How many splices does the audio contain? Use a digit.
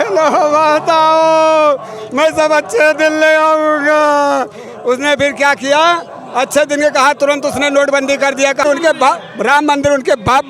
1